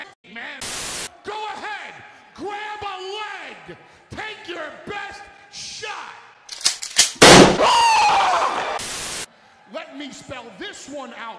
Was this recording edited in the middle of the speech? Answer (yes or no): no